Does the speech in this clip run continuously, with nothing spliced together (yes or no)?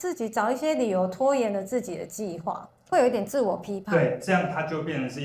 no